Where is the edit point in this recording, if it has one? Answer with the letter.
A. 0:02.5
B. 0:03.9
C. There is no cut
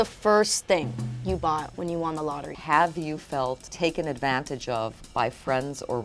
A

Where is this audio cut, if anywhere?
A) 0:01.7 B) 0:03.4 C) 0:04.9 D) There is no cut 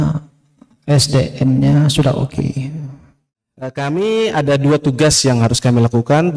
B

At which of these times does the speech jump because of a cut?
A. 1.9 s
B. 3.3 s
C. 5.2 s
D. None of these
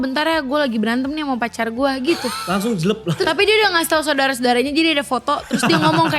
B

